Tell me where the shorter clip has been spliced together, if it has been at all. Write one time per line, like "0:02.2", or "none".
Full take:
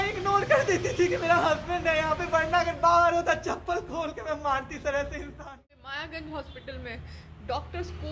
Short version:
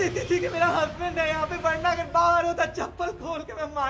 none